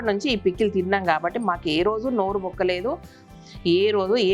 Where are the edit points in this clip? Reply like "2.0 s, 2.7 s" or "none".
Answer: none